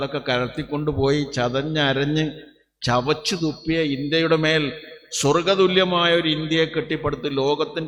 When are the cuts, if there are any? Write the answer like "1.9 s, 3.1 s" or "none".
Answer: none